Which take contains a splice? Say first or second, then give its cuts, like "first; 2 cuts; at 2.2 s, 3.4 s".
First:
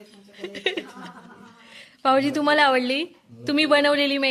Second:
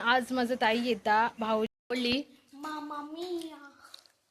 second; 1 cut; at 1.7 s